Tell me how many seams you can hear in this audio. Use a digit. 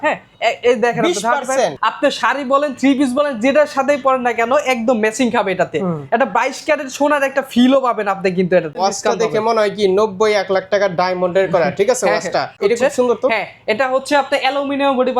3